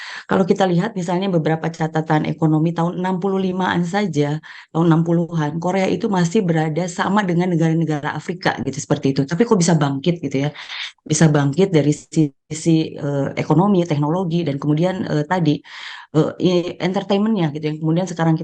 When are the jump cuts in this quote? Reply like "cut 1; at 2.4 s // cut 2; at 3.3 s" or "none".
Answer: none